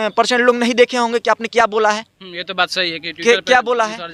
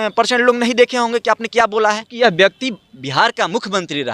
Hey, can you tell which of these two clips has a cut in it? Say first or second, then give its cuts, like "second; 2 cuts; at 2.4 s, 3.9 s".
second; 1 cut; at 2.1 s